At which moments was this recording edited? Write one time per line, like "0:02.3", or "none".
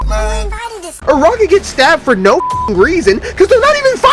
0:01.0